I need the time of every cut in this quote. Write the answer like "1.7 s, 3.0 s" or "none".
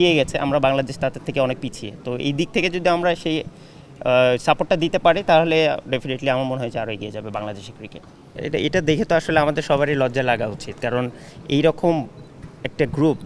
none